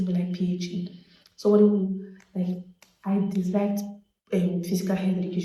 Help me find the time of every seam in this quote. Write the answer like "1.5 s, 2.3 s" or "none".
none

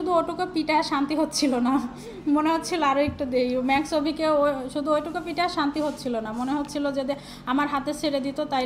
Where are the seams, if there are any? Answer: none

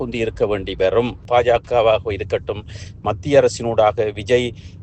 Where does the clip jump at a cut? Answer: 1.2 s

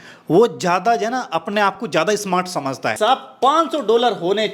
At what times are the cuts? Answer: 2.9 s

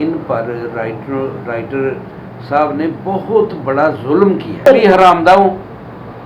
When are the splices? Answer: 4.7 s

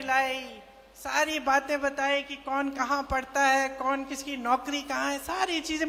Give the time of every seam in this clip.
none

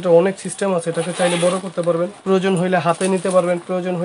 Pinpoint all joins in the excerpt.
2.2 s

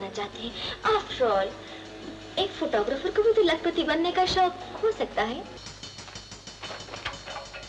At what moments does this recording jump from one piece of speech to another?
5.6 s

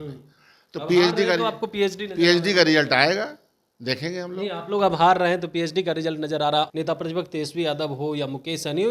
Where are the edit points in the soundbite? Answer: 6.7 s

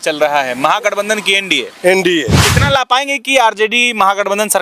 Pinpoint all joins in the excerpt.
2.5 s

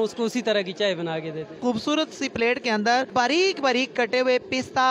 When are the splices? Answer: 1.6 s, 3.1 s

